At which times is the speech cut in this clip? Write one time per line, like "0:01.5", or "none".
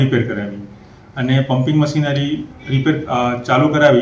none